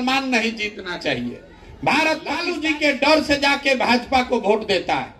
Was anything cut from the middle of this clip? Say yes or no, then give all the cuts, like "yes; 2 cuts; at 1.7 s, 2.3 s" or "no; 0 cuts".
yes; 1 cut; at 2.5 s